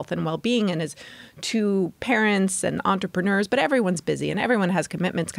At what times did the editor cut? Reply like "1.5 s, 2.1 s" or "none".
none